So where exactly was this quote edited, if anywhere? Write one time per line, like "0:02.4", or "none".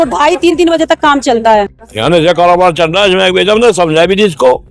0:01.8